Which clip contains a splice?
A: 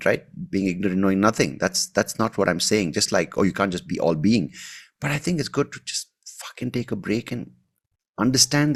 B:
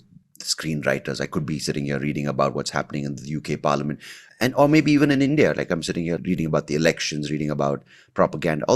B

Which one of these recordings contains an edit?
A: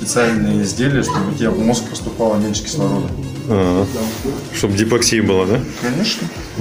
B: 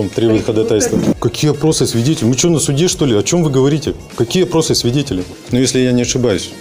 B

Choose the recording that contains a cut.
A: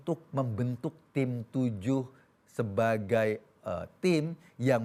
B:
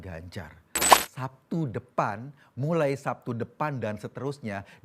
B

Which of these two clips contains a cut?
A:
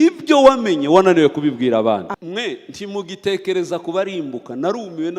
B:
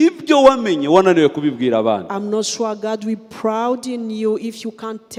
A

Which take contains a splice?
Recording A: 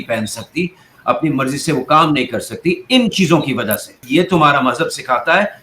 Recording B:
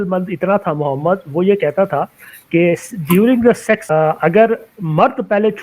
A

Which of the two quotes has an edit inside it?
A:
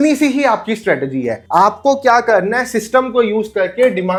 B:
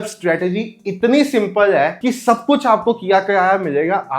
B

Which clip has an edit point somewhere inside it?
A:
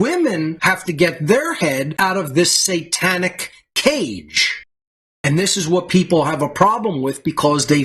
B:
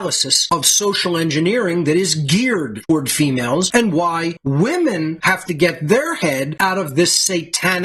A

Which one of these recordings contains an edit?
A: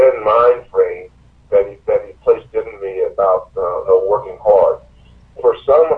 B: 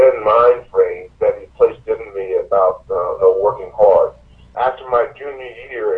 B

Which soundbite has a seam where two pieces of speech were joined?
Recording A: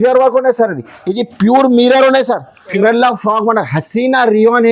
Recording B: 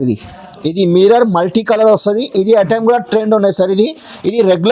A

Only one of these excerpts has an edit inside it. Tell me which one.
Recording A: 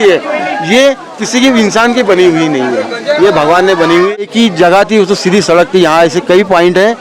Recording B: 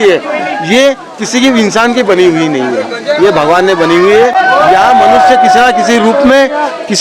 A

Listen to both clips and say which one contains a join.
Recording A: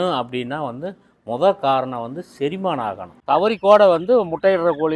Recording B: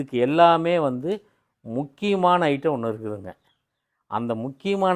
A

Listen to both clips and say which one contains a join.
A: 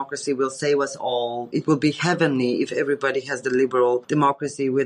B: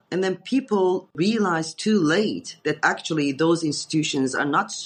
A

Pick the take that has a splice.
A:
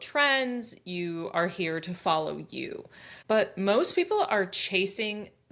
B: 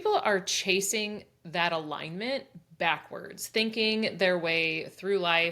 A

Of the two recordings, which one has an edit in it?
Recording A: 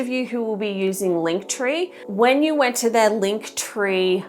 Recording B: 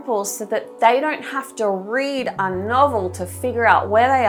A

